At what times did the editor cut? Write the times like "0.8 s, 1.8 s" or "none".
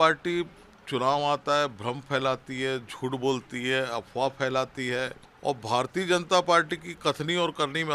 5.2 s